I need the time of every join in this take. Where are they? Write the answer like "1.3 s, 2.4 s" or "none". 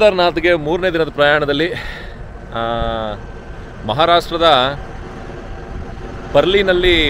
none